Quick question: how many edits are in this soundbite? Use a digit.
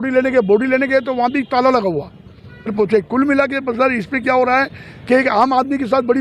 1